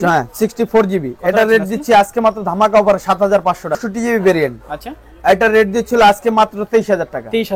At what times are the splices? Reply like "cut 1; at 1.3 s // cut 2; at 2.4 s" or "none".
cut 1; at 3.8 s